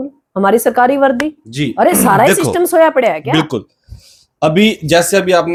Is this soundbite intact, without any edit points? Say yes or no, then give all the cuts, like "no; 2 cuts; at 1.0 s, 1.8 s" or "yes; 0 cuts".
yes; 0 cuts